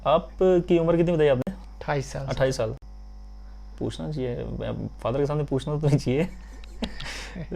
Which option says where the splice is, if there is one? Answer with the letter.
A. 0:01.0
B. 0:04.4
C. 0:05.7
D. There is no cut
D